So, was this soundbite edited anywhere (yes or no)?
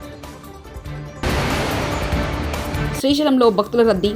yes